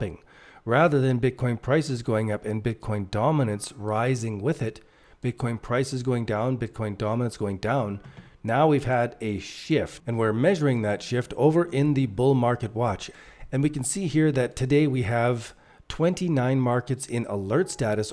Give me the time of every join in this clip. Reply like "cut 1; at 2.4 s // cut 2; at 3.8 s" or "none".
cut 1; at 10.0 s // cut 2; at 13.1 s